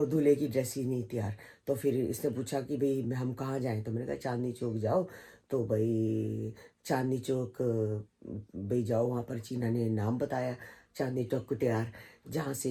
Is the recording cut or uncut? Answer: uncut